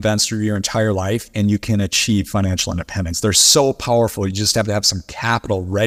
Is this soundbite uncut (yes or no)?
yes